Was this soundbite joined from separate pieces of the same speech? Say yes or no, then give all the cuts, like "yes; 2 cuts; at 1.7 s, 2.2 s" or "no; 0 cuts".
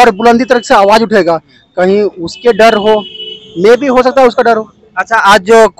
no; 0 cuts